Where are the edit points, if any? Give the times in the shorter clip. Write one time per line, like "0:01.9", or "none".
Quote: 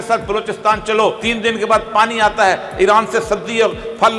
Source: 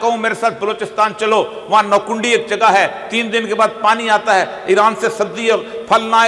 0:01.2